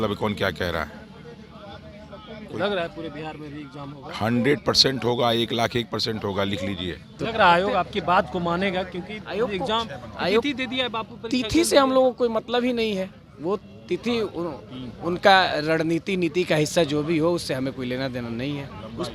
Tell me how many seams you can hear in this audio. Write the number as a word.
one